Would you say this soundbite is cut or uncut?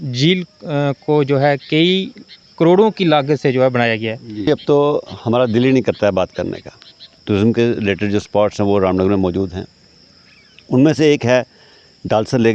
cut